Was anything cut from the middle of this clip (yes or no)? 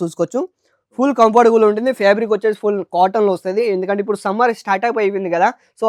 no